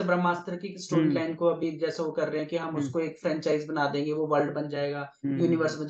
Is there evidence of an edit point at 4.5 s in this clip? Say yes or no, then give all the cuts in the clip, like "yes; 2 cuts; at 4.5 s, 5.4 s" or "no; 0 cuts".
no; 0 cuts